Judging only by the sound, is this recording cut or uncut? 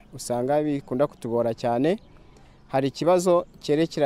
uncut